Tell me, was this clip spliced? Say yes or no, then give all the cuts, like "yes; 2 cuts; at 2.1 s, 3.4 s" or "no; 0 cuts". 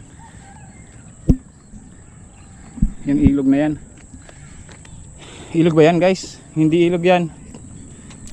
no; 0 cuts